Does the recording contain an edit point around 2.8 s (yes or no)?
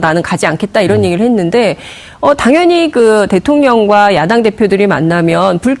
no